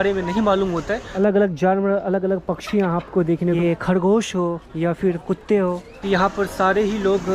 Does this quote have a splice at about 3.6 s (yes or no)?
yes